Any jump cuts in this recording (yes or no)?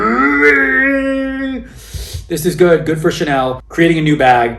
yes